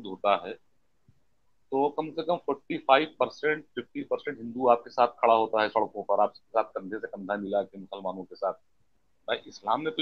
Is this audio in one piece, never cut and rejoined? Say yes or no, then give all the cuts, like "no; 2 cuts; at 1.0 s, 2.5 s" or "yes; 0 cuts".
no; 1 cut; at 8.8 s